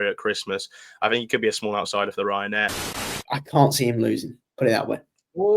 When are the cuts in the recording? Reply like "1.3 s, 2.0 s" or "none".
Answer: 2.8 s